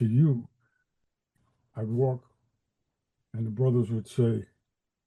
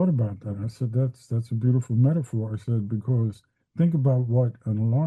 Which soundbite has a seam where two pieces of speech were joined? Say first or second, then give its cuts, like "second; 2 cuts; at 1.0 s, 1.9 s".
first; 1 cut; at 1.3 s